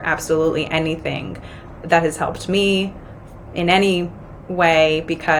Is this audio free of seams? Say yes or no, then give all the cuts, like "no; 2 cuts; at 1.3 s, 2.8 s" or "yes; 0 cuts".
yes; 0 cuts